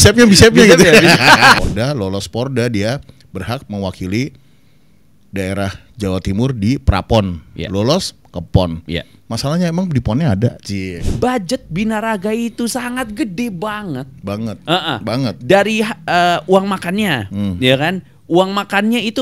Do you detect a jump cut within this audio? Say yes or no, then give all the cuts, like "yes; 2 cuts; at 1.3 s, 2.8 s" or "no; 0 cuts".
yes; 2 cuts; at 1.6 s, 11.0 s